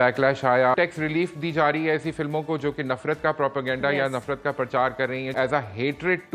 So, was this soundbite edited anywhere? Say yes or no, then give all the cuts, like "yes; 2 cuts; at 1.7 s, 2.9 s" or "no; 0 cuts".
yes; 2 cuts; at 0.7 s, 5.3 s